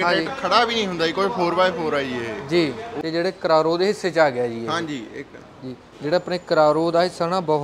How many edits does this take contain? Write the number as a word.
one